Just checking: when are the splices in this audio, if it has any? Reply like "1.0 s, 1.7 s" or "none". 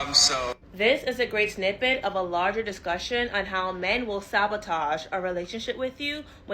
1.4 s